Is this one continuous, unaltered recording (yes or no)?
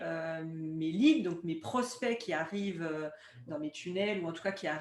yes